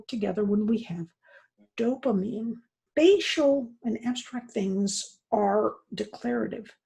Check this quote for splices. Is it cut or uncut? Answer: cut